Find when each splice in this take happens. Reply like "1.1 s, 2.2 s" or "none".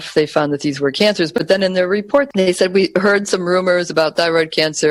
none